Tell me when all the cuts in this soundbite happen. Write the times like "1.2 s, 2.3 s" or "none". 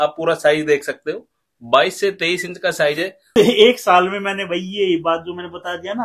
3.3 s

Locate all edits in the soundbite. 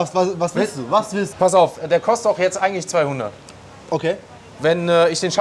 1.3 s

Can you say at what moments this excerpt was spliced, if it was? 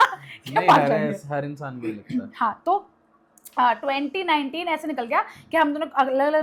none

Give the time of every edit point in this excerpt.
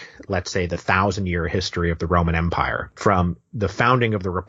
2.8 s

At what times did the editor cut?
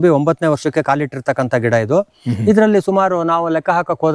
none

